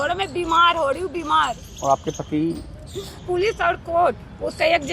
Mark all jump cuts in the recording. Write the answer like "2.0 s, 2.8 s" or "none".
3.2 s